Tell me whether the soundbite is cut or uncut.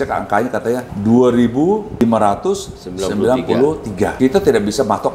cut